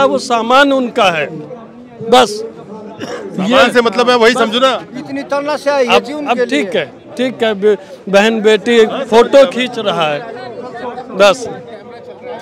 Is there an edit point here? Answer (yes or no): no